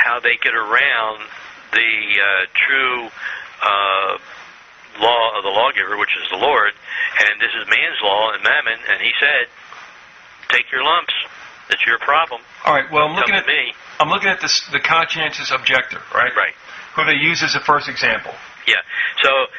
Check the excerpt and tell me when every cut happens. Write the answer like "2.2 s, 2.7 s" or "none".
6.7 s